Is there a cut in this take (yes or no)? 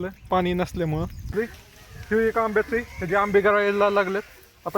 yes